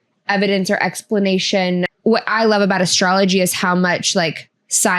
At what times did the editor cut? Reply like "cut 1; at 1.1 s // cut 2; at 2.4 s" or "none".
cut 1; at 1.9 s